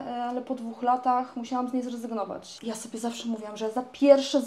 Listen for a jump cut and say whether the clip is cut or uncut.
cut